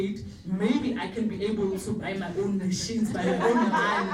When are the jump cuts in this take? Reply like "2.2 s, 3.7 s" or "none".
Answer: none